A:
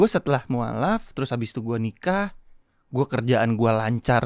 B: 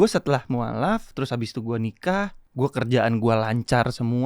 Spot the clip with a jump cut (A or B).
B